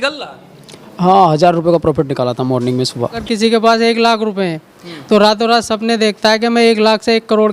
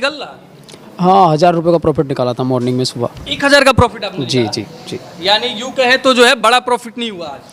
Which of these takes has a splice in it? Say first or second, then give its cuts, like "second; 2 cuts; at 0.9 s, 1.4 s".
first; 1 cut; at 3.2 s